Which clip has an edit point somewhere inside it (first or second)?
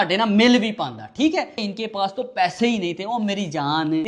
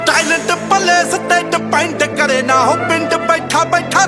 first